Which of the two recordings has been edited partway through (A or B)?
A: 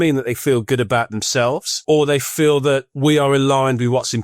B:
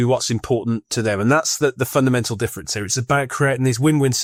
A